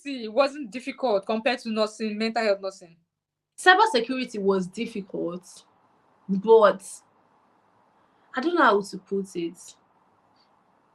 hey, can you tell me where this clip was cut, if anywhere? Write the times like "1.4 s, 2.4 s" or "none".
none